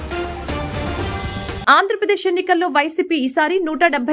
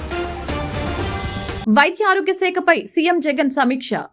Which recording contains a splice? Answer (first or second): first